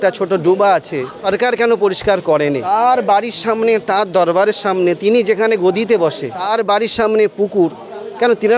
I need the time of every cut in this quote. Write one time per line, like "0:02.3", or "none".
0:01.1
0:02.7
0:06.3